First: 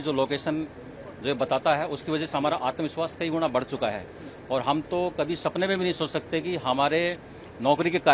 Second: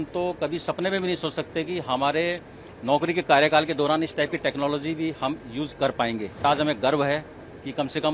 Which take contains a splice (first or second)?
second